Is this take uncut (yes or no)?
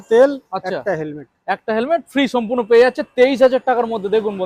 yes